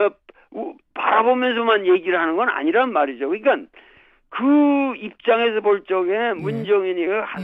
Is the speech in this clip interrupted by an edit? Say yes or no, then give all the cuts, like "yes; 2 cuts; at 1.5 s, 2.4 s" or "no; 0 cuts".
yes; 1 cut; at 3.7 s